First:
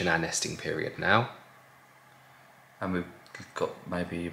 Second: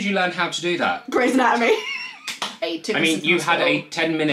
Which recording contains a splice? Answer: second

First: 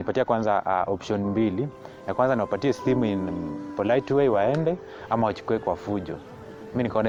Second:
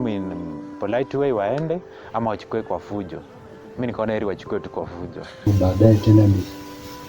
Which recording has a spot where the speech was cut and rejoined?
second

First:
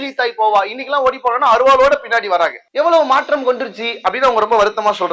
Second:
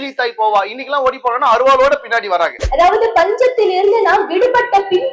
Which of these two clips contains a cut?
second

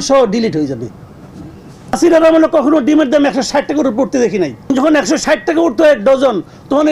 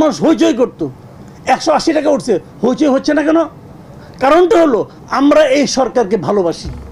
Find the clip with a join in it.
first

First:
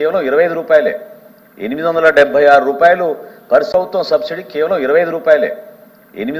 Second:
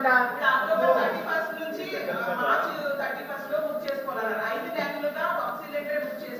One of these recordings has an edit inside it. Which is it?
first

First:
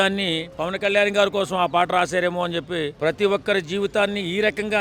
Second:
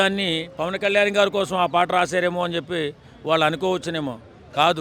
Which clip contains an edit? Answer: first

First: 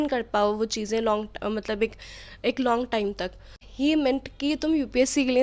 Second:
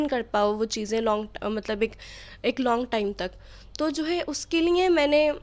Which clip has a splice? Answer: first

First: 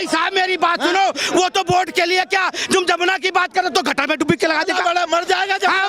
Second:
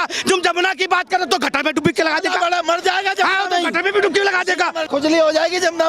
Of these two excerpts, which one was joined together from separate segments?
second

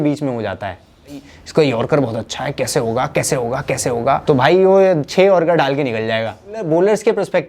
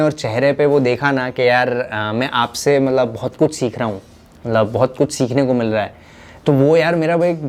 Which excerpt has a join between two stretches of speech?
first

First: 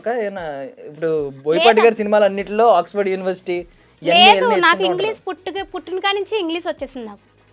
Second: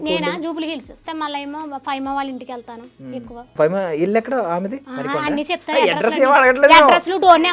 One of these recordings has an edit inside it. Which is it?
second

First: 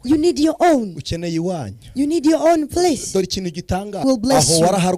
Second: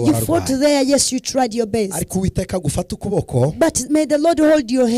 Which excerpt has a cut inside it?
first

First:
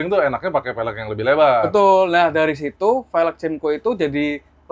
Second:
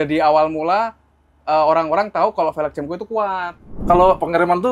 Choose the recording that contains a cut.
second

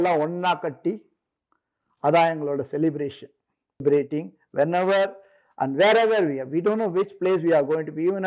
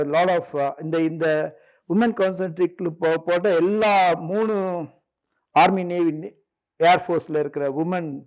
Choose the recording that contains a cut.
first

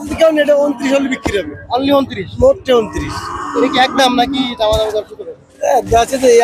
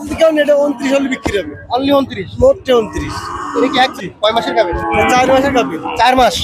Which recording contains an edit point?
second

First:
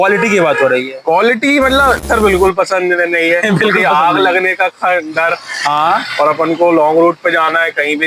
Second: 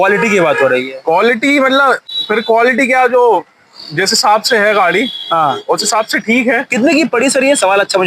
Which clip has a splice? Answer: first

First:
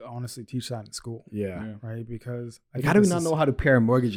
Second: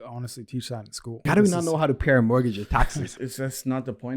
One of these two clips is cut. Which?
second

